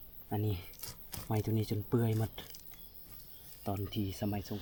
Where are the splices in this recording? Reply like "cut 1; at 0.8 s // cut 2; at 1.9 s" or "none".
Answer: none

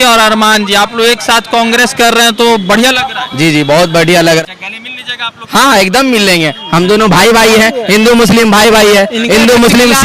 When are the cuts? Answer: cut 1; at 4.4 s

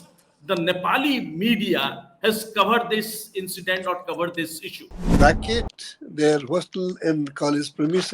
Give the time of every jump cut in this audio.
cut 1; at 5.0 s

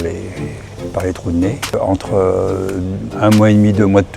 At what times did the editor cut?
cut 1; at 1.7 s

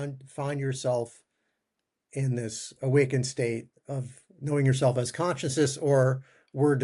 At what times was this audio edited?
none

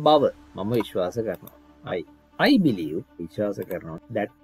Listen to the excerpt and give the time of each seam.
none

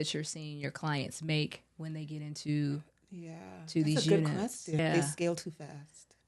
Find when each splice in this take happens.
cut 1; at 4.8 s

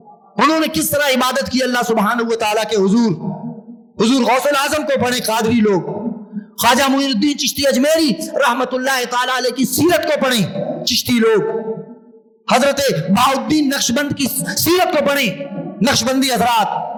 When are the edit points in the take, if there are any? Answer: none

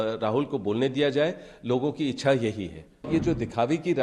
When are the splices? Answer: cut 1; at 3.1 s

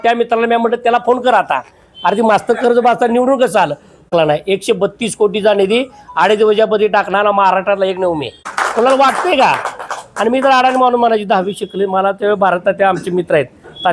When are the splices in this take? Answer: cut 1; at 4.1 s // cut 2; at 8.5 s

